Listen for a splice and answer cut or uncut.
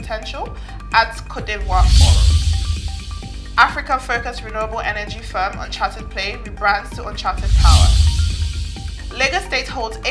uncut